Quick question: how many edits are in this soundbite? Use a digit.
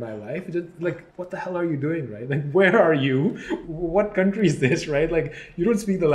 1